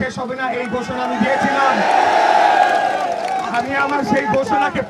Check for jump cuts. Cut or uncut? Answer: uncut